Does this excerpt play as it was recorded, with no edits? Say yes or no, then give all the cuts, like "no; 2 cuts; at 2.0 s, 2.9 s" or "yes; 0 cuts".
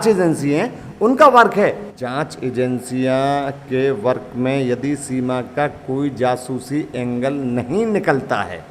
no; 1 cut; at 1.9 s